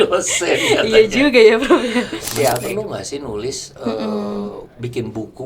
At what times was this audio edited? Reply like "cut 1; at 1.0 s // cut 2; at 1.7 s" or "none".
cut 1; at 2.6 s